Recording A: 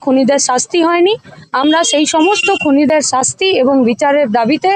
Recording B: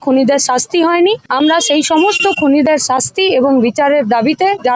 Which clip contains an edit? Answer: B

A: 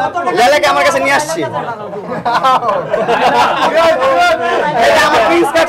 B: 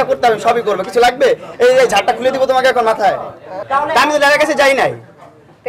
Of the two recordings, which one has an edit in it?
B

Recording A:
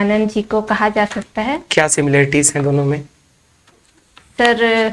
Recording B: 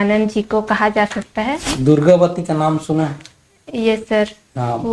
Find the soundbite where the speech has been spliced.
B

